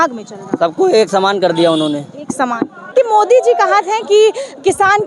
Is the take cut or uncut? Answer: uncut